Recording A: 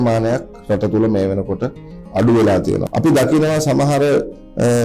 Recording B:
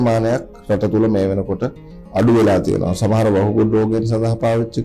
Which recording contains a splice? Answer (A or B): A